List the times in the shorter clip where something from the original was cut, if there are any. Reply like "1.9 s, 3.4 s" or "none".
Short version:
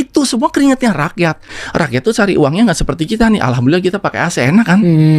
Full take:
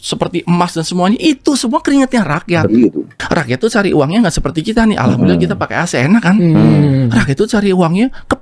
1.3 s